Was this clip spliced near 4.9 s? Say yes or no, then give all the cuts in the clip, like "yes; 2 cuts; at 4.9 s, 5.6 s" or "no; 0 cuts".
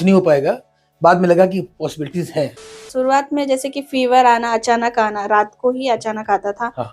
no; 1 cut; at 2.8 s